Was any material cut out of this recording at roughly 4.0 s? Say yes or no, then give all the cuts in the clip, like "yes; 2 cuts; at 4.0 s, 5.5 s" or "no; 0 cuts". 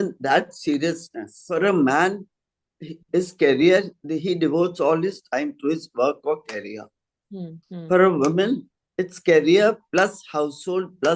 no; 1 cut; at 1.4 s